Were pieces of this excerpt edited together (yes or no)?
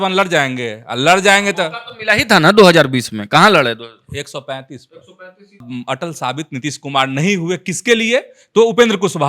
yes